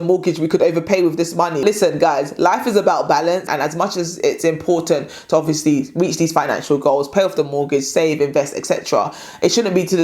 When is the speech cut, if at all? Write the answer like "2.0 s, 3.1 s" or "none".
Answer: 1.6 s